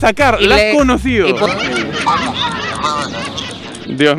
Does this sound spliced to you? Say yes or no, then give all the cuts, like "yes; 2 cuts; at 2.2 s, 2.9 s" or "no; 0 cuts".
yes; 1 cut; at 1.5 s